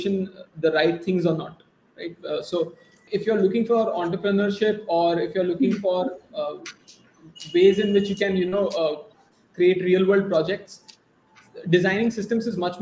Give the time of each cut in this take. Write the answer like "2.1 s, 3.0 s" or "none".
3.0 s